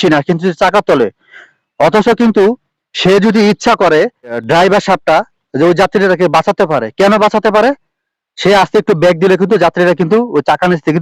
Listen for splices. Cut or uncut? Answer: cut